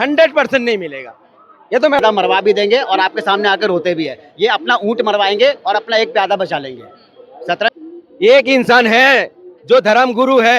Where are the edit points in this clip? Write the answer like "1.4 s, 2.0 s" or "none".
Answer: 2.0 s, 7.7 s